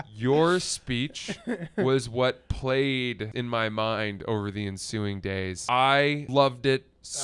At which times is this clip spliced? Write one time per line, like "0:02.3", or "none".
0:03.3
0:05.6
0:06.2